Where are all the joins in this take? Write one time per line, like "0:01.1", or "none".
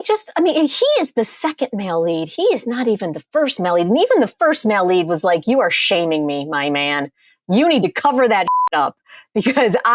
none